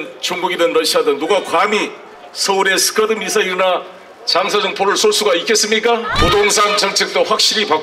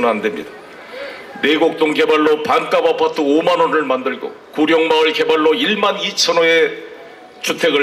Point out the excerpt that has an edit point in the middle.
first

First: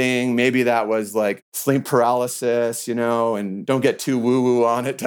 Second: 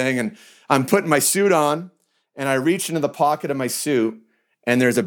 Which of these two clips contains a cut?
first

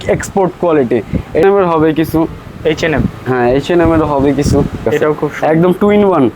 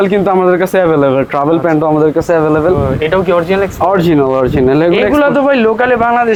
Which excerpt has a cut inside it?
first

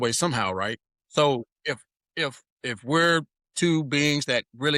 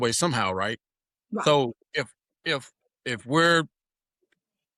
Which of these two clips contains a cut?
first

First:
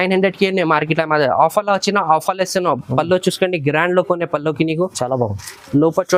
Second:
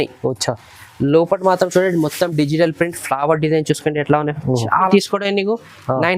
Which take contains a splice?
second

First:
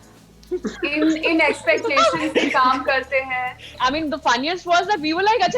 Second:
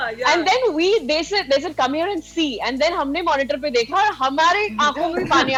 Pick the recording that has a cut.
first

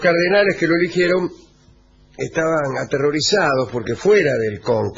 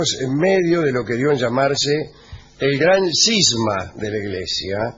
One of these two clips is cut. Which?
first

